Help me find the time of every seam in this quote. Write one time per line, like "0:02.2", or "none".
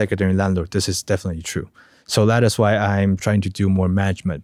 none